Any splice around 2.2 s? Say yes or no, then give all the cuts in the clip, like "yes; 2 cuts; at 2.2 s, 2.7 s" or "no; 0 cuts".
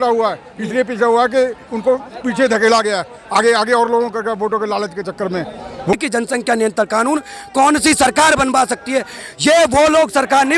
no; 1 cut; at 5.9 s